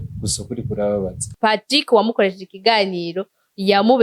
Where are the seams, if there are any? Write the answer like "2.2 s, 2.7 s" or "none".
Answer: 1.2 s